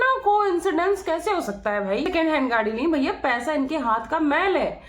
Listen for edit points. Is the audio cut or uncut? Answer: cut